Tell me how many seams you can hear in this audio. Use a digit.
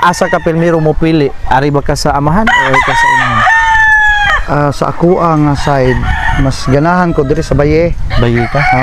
0